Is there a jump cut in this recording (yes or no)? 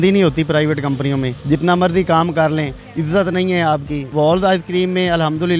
yes